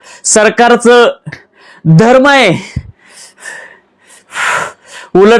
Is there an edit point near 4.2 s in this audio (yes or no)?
yes